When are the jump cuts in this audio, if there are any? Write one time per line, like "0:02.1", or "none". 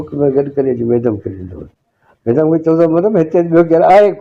none